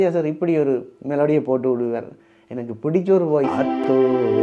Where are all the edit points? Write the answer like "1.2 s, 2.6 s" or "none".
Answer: 3.5 s